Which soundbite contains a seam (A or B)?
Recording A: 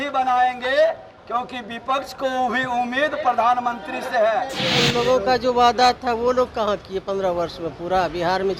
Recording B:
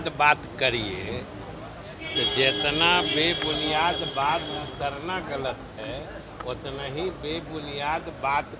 A